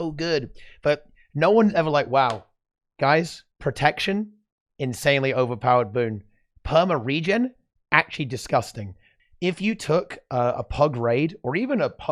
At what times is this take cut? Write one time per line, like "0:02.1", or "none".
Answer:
0:09.1